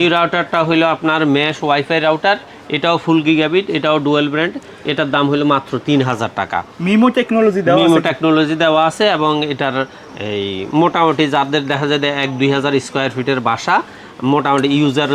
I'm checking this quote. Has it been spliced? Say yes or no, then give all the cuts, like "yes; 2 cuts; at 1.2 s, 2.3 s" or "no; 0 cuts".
no; 0 cuts